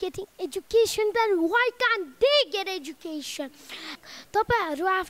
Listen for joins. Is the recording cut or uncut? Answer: cut